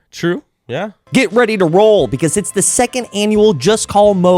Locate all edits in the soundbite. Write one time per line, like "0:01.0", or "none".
0:00.9